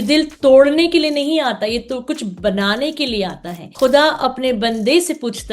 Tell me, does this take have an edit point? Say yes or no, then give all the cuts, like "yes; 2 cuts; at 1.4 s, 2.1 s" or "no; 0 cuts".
yes; 1 cut; at 3.7 s